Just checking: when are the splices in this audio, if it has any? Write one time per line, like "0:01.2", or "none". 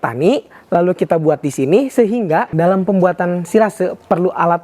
0:02.5